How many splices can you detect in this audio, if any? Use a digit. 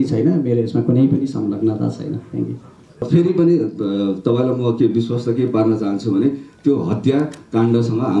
1